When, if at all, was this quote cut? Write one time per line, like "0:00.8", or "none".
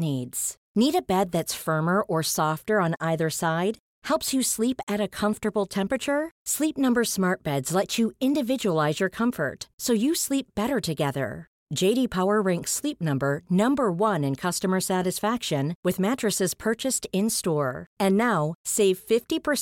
none

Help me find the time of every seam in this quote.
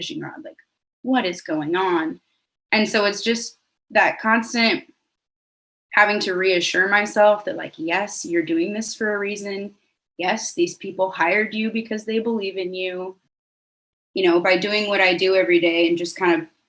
0:13.6

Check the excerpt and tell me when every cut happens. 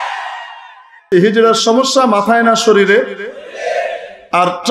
0:01.1

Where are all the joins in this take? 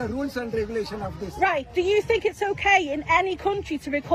none

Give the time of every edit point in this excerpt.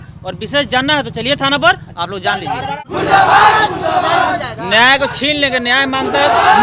0:02.7

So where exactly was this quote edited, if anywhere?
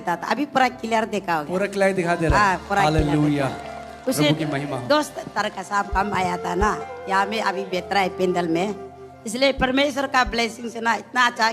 none

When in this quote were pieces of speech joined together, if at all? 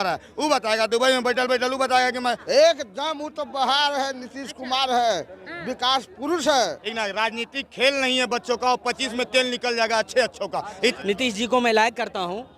0:02.4
0:06.8
0:10.9

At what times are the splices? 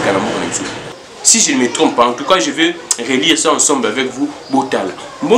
0:00.9

